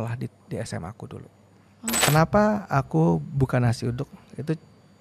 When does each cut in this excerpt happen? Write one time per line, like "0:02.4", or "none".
0:02.0

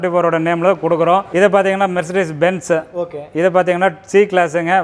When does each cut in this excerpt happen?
0:01.3

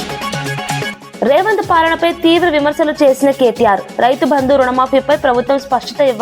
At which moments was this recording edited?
0:01.0

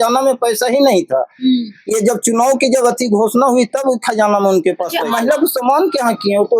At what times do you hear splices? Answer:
0:05.0

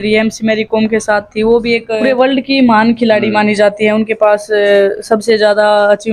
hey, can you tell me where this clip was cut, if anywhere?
0:02.0

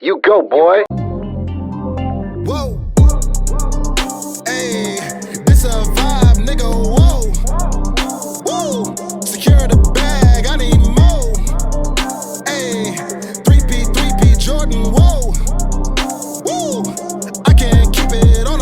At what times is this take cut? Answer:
0:00.9

